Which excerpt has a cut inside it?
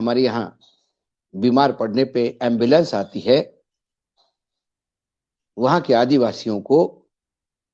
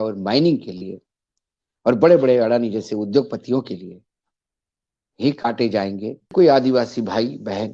second; 1 cut; at 6.3 s

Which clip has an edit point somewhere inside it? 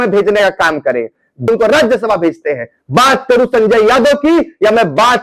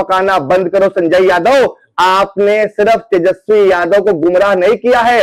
first; 1 cut; at 1.5 s

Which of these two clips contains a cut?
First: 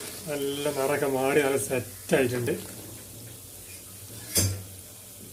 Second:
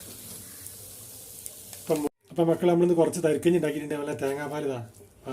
second; 1 cut; at 2.1 s

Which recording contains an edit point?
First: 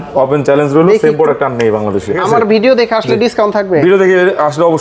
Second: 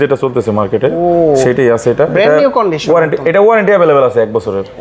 first; 1 cut; at 2.2 s

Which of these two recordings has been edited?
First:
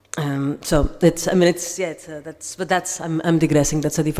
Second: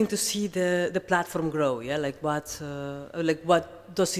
second; 1 cut; at 2.1 s

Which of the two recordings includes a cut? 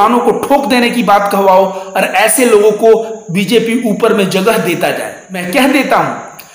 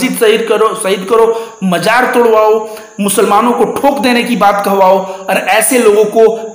first; 1 cut; at 5.3 s

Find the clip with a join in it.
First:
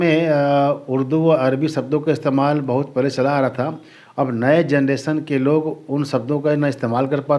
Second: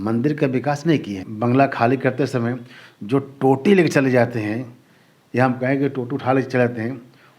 second; 1 cut; at 1.2 s

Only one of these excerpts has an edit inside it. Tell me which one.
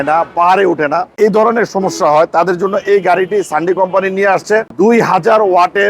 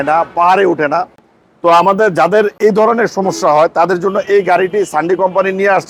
first; 2 cuts; at 1.1 s, 4.7 s

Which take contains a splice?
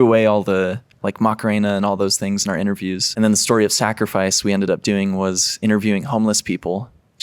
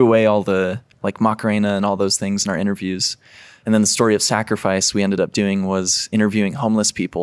first; 1 cut; at 3.0 s

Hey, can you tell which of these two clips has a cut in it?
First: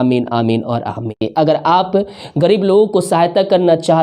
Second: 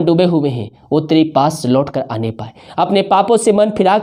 first; 1 cut; at 1.2 s

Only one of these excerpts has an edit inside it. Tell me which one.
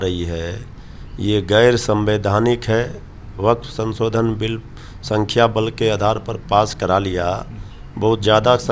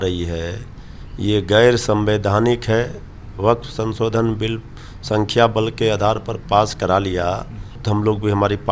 second; 1 cut; at 7.8 s

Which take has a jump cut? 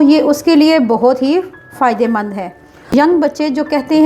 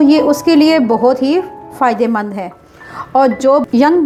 first; 1 cut; at 2.9 s

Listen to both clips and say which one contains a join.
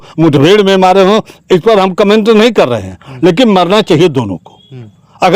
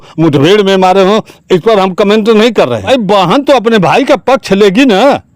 second; 1 cut; at 2.9 s

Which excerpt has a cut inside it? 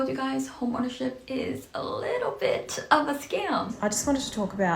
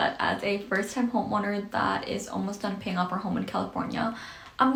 first; 1 cut; at 3.7 s

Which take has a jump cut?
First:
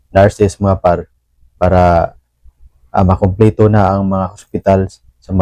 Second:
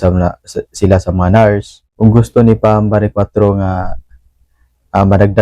second; 1 cut; at 1.8 s

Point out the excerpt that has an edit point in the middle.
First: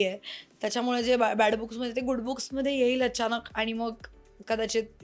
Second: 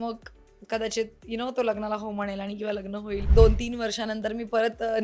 second; 1 cut; at 3.3 s

